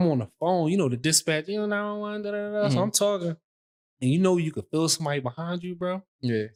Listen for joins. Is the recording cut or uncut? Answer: uncut